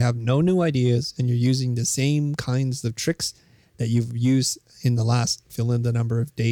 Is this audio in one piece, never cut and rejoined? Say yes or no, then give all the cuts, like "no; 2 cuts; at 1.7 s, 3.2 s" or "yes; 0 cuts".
yes; 0 cuts